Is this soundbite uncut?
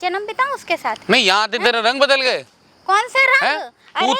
yes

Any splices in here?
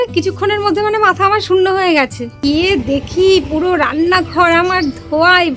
yes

